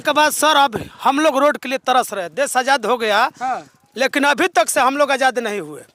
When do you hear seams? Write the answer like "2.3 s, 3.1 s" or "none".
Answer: none